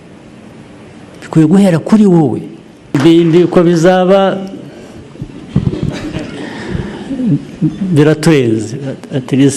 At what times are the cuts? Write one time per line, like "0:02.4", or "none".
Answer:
0:03.0